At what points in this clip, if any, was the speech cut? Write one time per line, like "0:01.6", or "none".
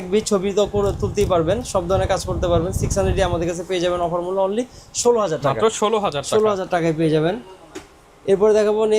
none

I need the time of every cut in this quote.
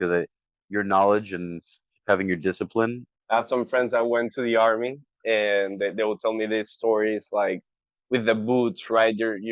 0:03.1

